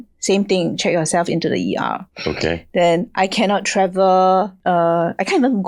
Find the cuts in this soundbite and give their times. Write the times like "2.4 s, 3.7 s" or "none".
4.6 s